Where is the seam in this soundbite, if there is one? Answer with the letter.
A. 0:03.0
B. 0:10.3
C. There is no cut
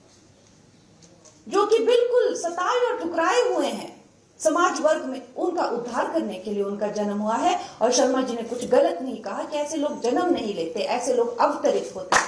C